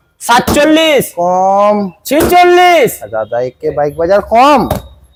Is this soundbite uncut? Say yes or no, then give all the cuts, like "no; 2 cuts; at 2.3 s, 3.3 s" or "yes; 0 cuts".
yes; 0 cuts